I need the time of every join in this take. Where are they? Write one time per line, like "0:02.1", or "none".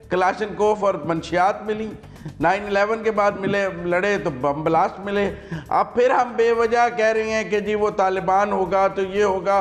none

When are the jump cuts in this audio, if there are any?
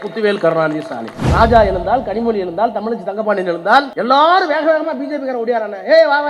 0:01.2
0:03.9

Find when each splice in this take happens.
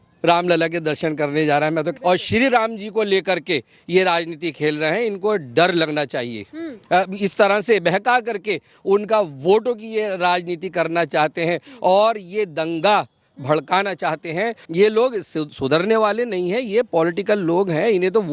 0:01.9
0:06.7
0:14.6

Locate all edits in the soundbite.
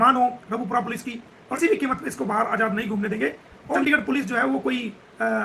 0:01.6
0:03.8

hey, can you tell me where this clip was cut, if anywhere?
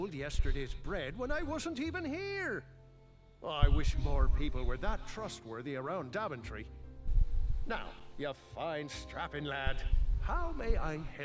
0:07.8

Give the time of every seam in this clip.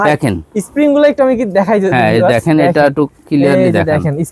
none

